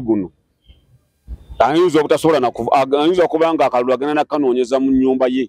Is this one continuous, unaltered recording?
yes; 0 cuts

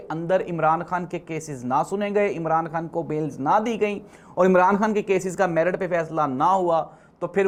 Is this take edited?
no; 0 cuts

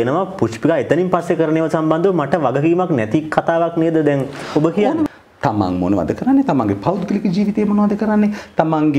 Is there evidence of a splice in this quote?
yes; 1 cut; at 5.1 s

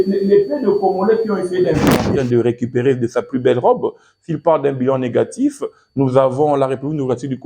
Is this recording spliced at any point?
yes; 1 cut; at 2.1 s

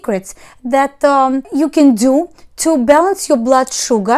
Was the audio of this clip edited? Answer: yes; 1 cut; at 1.5 s

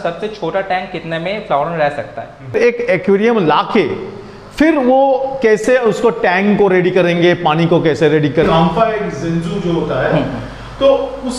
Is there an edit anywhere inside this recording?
yes; 2 cuts; at 2.5 s, 8.5 s

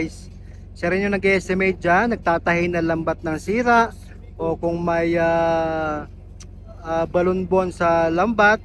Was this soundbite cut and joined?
no; 0 cuts

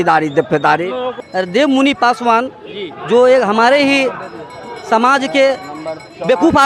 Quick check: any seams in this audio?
yes; 1 cut; at 1.2 s

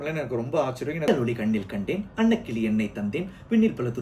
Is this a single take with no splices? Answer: no; 1 cut; at 1.1 s

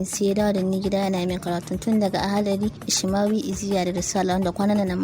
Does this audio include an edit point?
yes; 1 cut; at 2.9 s

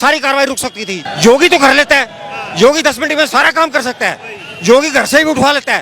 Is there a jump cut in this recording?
yes; 1 cut; at 0.9 s

